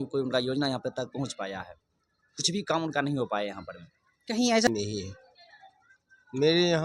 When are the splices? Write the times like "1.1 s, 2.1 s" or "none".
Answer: 4.7 s